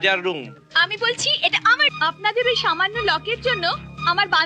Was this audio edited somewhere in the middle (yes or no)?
yes